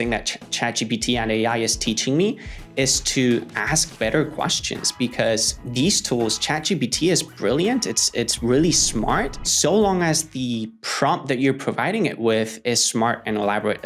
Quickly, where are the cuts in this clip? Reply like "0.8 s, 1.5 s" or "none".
5.6 s, 9.4 s